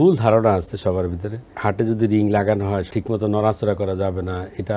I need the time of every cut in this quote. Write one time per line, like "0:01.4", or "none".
0:01.5
0:02.9